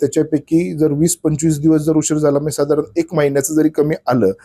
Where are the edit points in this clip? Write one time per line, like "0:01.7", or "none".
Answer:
none